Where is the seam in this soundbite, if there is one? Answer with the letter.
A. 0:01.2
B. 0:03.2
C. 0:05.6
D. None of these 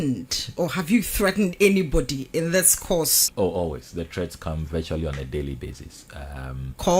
B